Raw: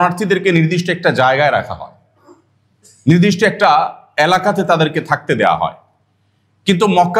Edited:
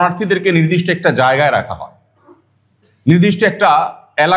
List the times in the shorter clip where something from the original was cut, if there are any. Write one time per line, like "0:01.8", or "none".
none

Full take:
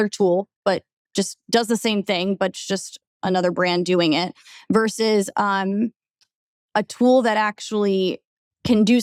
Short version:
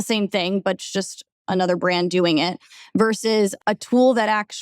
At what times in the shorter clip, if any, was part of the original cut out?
0:03.5

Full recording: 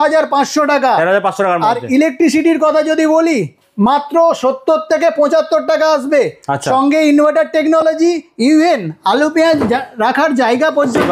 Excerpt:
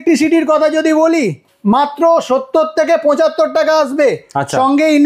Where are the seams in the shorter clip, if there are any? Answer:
none

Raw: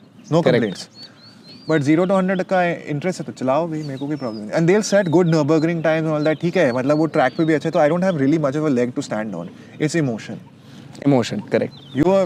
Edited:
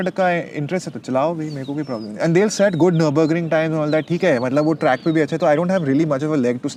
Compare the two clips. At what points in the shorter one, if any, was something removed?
none

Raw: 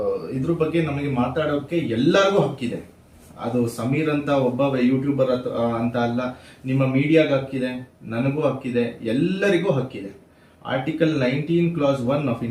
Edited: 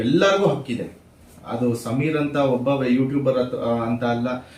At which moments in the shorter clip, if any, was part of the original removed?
none

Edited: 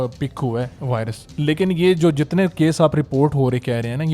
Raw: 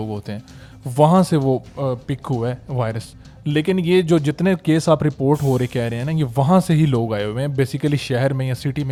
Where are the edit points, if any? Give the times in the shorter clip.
0:01.2

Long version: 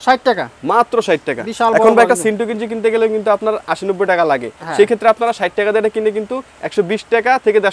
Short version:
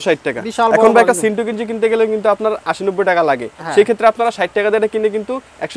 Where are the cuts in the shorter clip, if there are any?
none

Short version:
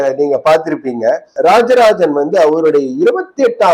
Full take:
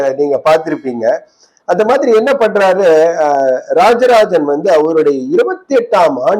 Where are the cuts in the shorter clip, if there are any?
0:01.3

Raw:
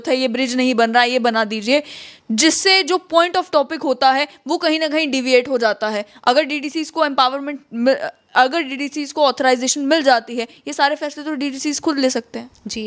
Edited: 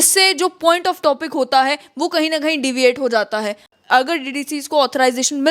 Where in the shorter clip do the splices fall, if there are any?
0:03.6

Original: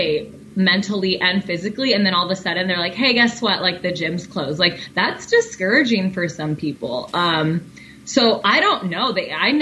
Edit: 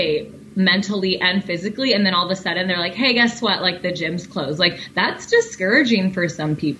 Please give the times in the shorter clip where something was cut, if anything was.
none

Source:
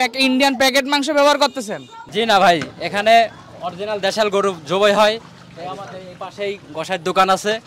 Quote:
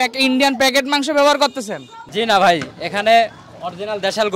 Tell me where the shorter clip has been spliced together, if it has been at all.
none

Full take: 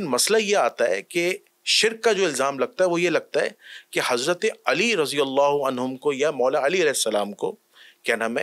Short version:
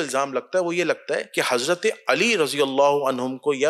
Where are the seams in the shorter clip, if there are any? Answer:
0:01.3

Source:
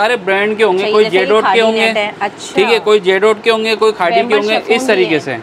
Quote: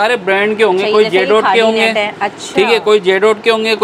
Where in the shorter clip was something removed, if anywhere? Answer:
none

